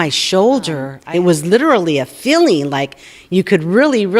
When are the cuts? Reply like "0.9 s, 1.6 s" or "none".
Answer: 0.9 s